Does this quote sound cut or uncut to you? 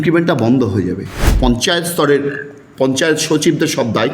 cut